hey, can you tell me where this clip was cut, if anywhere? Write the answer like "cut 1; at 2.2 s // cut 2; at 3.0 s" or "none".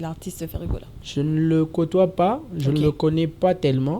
cut 1; at 1.0 s